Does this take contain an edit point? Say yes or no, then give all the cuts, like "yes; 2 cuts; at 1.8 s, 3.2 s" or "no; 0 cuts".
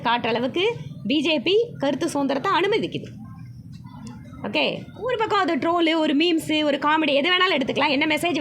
no; 0 cuts